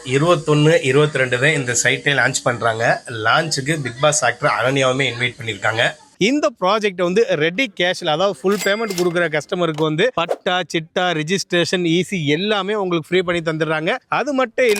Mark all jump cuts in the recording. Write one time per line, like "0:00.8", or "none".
none